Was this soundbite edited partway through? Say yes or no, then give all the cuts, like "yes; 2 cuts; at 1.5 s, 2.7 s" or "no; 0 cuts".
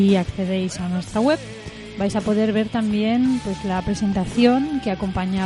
yes; 1 cut; at 2.1 s